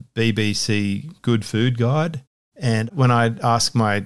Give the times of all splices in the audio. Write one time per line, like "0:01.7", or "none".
0:02.9